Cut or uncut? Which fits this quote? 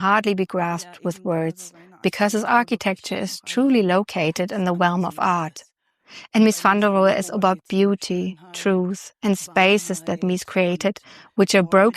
uncut